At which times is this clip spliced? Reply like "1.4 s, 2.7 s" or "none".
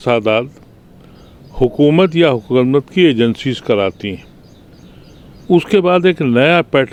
none